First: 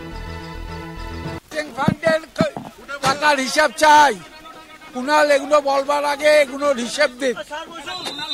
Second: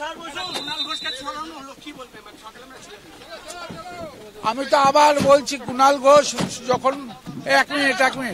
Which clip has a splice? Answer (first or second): first